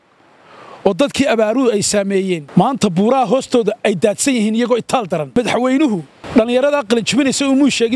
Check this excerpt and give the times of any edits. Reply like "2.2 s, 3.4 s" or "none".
2.4 s, 5.4 s, 6.2 s